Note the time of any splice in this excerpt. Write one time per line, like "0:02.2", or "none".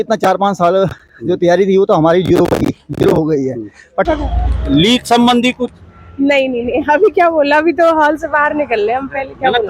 0:04.1